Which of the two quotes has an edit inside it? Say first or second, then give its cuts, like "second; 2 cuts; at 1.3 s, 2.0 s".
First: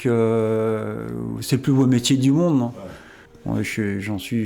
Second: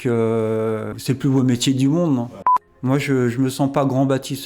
second; 2 cuts; at 0.9 s, 2.8 s